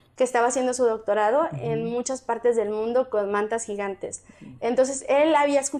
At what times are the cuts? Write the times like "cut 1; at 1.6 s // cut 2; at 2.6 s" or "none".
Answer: none